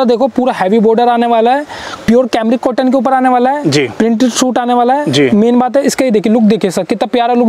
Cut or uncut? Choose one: cut